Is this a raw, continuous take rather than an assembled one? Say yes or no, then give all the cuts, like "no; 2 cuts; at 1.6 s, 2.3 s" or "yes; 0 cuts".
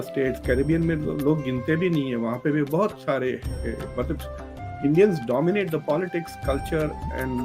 yes; 0 cuts